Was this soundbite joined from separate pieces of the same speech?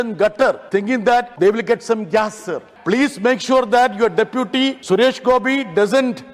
yes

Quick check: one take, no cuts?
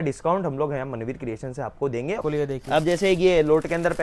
no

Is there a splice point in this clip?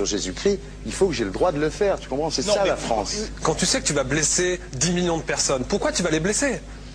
no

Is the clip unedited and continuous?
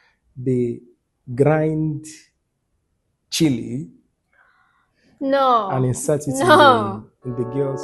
yes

